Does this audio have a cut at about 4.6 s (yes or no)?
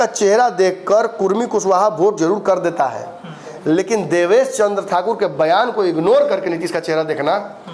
no